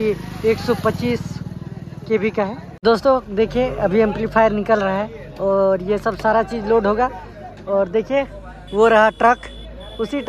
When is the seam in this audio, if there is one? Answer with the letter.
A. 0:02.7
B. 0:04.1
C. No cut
A